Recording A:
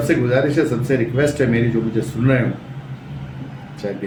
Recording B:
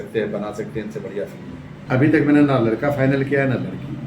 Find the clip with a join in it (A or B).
B